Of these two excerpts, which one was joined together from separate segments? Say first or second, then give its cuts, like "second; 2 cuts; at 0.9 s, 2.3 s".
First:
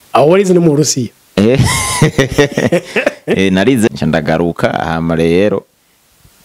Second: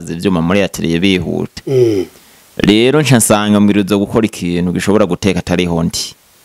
first; 1 cut; at 3.9 s